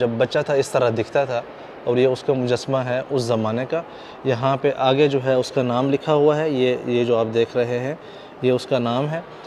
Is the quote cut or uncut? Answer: uncut